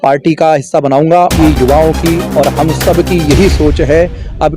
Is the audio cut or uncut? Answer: cut